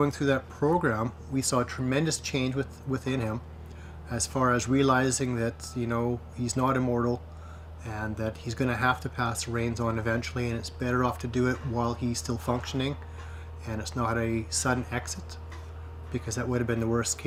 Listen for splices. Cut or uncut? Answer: uncut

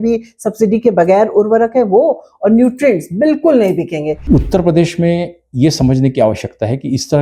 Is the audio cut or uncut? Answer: cut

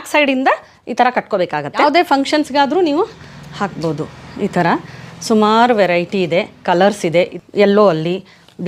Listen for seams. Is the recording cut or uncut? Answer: cut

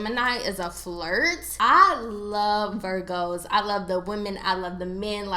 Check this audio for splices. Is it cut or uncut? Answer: cut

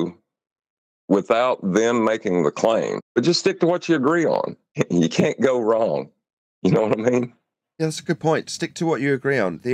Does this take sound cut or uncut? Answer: cut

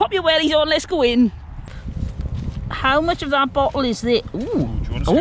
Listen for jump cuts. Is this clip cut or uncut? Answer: cut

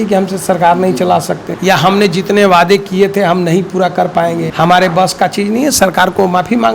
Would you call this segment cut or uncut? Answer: cut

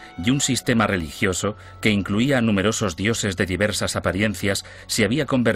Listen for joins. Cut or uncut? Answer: uncut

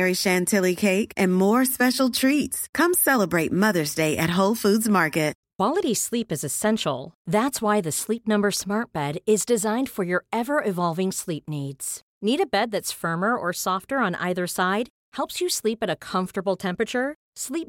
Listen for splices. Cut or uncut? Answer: cut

